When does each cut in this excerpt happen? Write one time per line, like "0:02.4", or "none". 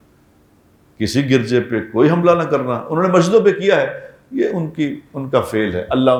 none